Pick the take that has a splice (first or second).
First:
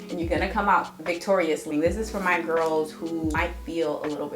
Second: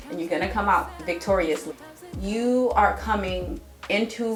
first